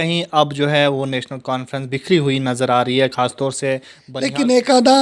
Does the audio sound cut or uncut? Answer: cut